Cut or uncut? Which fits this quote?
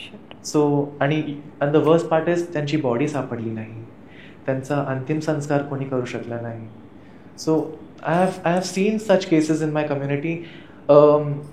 uncut